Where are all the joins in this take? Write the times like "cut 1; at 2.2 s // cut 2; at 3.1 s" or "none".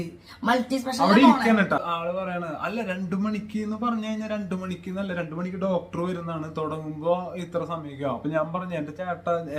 cut 1; at 1.9 s

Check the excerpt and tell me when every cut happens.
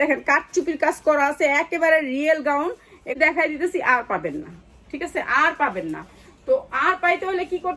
cut 1; at 3.2 s

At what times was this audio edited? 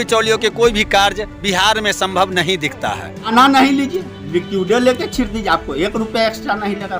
cut 1; at 3.3 s

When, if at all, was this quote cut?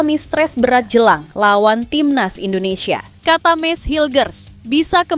cut 1; at 3.1 s

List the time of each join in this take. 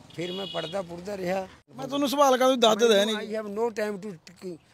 cut 1; at 1.7 s

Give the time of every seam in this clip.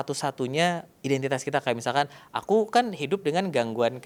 none

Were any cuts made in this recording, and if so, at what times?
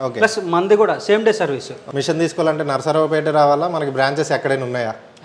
cut 1; at 1.8 s

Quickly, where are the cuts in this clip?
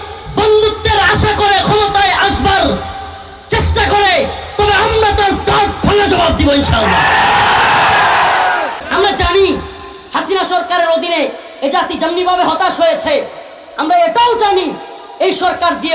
cut 1; at 8.8 s

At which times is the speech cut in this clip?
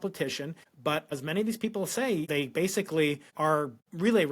cut 1; at 1.0 s // cut 2; at 2.3 s // cut 3; at 3.4 s

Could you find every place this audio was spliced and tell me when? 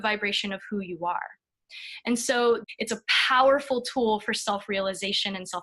cut 1; at 2.6 s

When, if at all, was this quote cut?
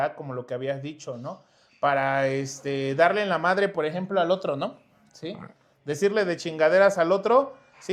none

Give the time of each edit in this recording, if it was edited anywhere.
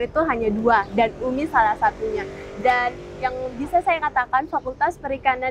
none

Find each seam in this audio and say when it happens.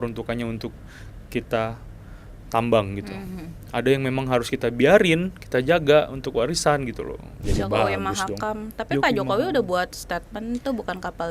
cut 1; at 7.5 s

